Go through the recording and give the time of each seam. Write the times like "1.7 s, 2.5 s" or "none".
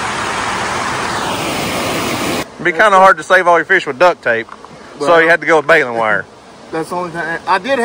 2.5 s